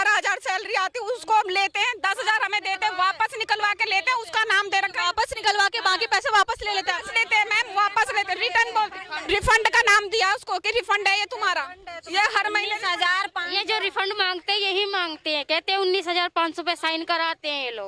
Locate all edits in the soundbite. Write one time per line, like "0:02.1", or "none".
none